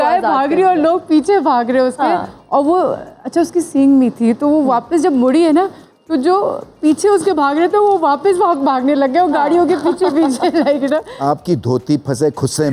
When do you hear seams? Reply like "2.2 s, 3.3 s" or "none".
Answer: 11.1 s